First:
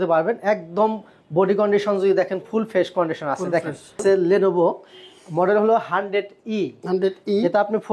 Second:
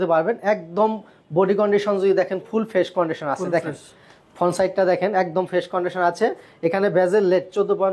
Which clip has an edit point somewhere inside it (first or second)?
first